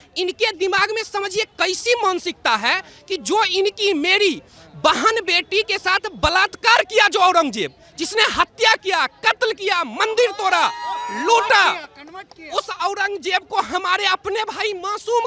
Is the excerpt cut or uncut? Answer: uncut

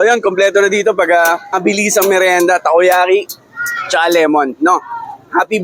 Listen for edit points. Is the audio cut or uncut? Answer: cut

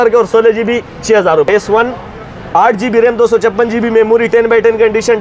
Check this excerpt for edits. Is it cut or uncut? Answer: cut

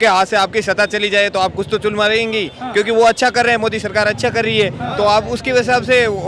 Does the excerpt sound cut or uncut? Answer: uncut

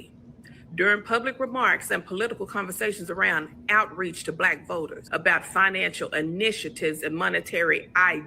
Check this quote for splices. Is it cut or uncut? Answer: cut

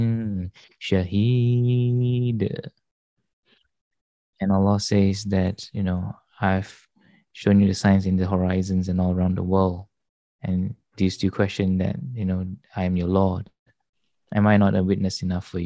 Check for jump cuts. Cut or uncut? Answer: uncut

